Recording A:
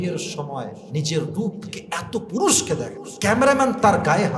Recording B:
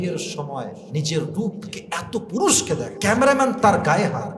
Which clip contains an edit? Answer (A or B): B